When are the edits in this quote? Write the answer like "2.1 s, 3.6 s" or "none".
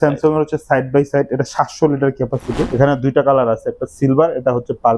2.7 s